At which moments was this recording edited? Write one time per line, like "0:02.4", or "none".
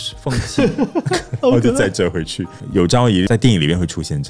0:02.5
0:03.3